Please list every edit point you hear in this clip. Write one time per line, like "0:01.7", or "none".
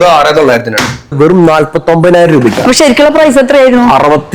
0:01.1